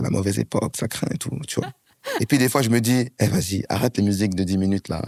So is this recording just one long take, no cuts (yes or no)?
yes